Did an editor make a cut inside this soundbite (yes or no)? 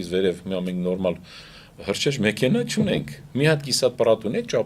no